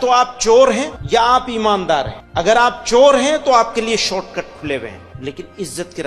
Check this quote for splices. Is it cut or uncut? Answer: cut